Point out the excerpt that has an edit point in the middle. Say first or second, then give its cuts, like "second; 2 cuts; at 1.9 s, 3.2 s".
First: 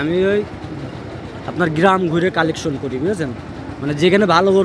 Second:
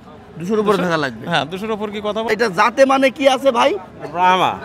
second; 1 cut; at 2.3 s